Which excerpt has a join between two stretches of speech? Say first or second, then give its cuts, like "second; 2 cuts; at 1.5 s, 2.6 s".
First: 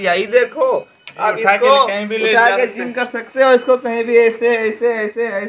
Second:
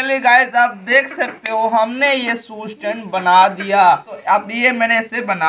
second; 1 cut; at 4.1 s